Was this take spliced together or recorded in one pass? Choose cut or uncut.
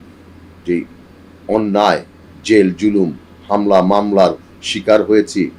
uncut